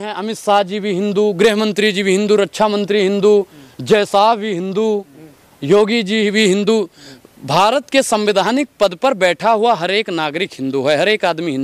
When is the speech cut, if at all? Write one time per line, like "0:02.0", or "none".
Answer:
none